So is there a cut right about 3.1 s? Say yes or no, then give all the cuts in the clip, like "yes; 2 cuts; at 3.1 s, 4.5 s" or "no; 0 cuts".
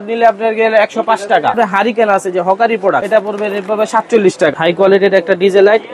yes; 3 cuts; at 1.5 s, 3.1 s, 4.5 s